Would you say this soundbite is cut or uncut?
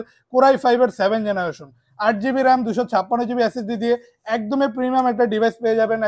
uncut